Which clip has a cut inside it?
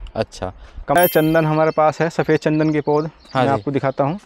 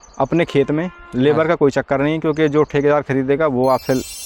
first; 1 cut; at 1.0 s

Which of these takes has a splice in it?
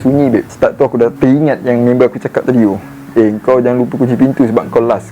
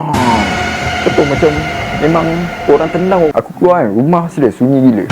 second; 1 cut; at 3.3 s

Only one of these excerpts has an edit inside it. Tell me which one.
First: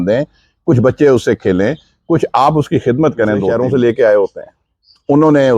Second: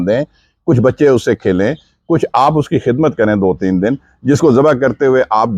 first; 1 cut; at 3.5 s

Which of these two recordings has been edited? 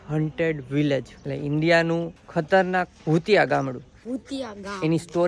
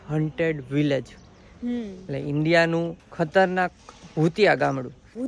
first; 2 cuts; at 1.2 s, 2.9 s

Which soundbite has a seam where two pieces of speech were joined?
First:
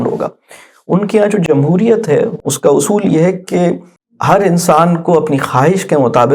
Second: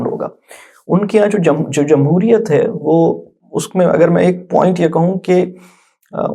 first; 2 cuts; at 1.4 s, 2.4 s

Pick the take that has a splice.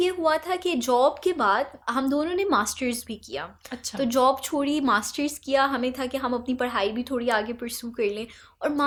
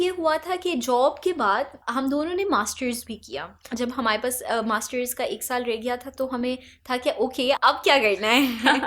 second; 1 cut; at 3.7 s

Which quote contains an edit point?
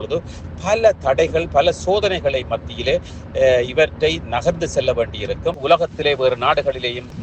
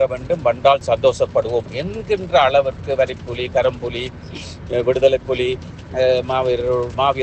first; 1 cut; at 5.5 s

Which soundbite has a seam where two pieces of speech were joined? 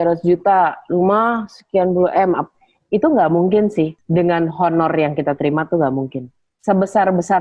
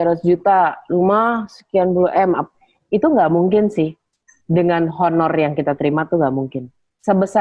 first; 1 cut; at 4.0 s

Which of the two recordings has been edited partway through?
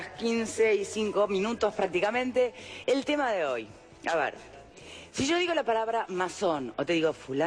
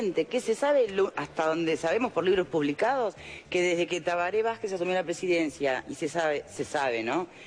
second; 1 cut; at 6.4 s

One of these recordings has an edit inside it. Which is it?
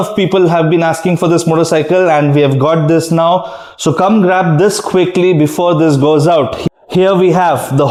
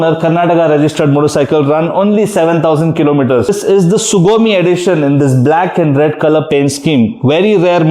second; 1 cut; at 3.5 s

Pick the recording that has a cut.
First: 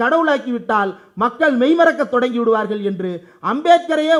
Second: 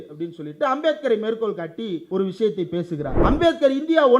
second; 2 cuts; at 2.0 s, 3.1 s

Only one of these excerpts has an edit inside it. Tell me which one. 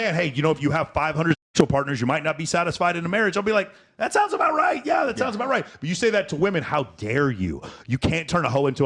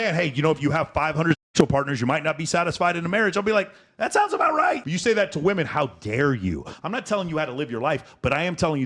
second; 2 cuts; at 4.8 s, 6.7 s

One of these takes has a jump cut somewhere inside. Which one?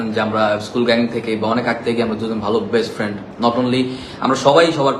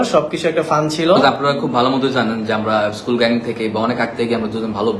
second; 1 cut; at 1.2 s

